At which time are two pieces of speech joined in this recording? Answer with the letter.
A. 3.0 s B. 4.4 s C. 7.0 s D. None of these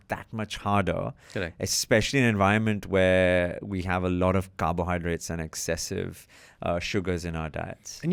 D